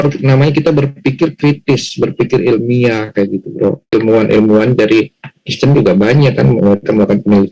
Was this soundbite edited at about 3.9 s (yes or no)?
yes